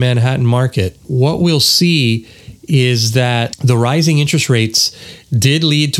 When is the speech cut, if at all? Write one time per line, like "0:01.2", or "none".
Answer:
0:01.0
0:03.5

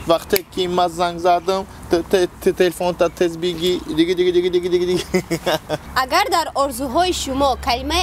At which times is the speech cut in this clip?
0:05.8

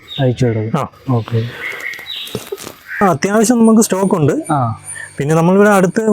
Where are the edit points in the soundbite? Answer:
0:03.0

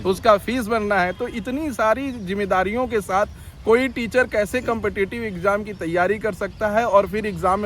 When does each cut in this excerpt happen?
none

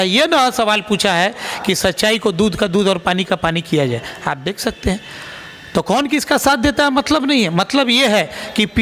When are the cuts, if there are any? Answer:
none

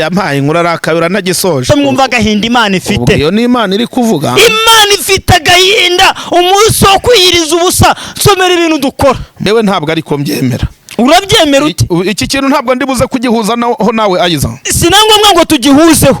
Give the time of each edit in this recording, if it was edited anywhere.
0:01.7
0:09.3

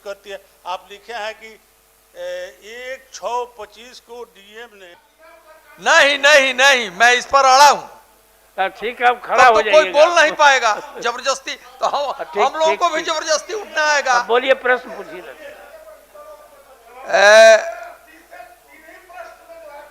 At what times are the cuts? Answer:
0:04.9

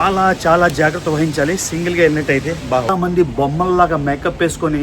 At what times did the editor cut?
0:02.9

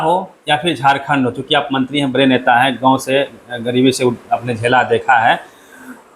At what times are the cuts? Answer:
none

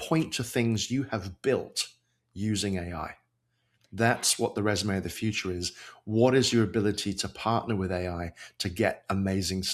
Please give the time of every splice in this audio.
none

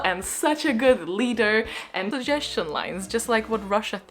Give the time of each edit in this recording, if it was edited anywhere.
0:02.1

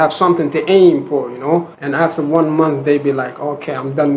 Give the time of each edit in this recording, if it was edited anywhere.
0:01.8

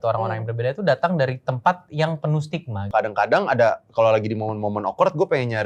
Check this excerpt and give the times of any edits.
0:02.9

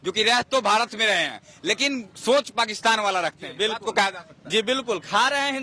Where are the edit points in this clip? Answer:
none

